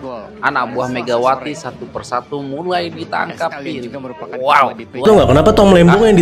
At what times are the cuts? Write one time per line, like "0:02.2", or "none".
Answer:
0:05.1

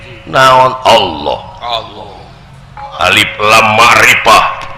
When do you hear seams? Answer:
0:02.8

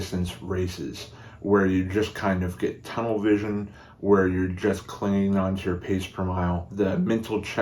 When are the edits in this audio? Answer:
0:06.6

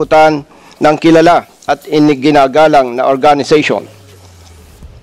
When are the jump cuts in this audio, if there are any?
none

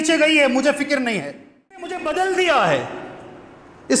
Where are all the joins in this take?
0:01.9

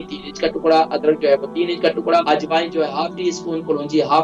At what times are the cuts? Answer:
0:02.2

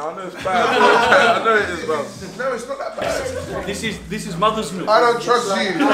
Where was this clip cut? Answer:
0:03.2

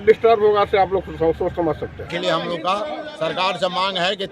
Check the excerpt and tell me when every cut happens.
0:02.0

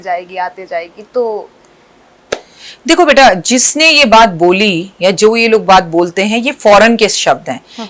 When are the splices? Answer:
none

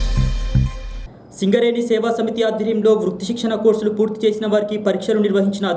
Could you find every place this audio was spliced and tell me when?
0:00.9

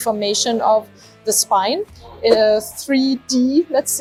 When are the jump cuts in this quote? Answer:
none

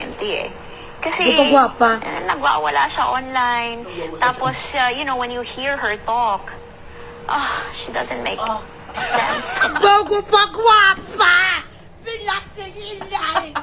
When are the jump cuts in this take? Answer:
none

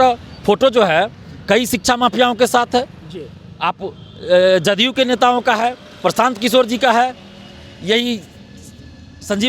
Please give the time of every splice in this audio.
none

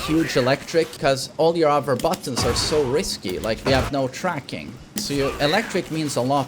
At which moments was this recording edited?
0:00.9

